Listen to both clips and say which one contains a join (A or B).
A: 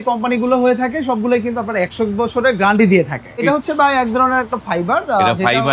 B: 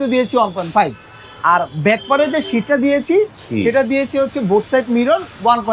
A